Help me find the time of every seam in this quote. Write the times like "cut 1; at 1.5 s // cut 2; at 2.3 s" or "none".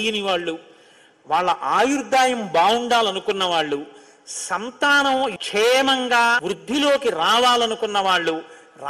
cut 1; at 6.5 s